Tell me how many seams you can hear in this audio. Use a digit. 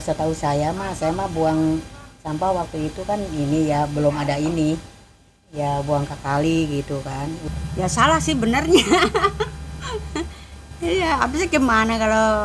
1